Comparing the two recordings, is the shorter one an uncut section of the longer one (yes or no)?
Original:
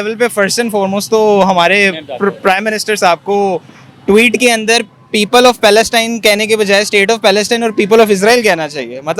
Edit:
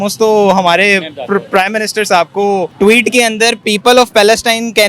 no